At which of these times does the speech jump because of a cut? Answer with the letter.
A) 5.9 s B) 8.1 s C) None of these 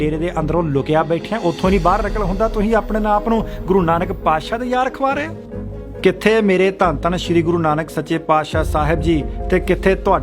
A